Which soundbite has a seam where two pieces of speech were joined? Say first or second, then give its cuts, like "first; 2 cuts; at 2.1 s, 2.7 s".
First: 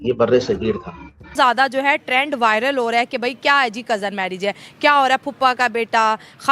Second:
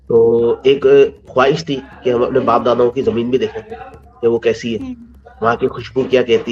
first; 1 cut; at 1.4 s